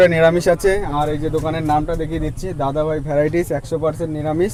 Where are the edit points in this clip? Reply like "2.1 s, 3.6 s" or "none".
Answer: none